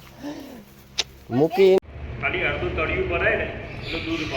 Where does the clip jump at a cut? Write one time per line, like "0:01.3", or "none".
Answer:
0:01.8